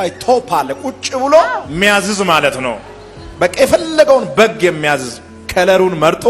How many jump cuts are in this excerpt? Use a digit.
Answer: 1